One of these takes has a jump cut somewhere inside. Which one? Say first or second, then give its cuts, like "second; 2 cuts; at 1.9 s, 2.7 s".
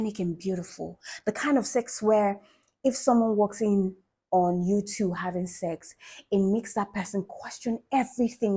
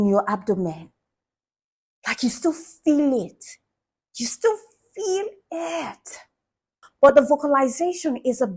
second; 1 cut; at 6.8 s